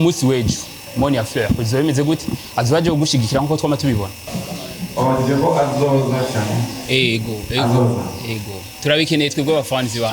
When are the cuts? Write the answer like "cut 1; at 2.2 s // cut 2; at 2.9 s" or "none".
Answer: cut 1; at 4.3 s

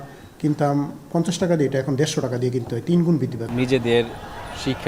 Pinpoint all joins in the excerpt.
cut 1; at 3.4 s

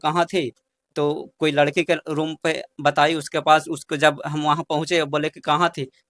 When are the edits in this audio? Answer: none

